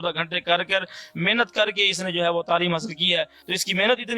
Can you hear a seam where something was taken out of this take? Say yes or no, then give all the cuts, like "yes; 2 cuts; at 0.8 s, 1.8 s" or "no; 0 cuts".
no; 0 cuts